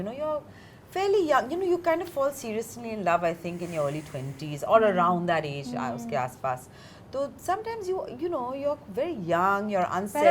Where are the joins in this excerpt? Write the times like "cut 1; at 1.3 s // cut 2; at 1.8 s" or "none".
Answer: none